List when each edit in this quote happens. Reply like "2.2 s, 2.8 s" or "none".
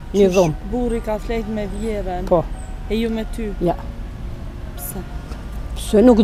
none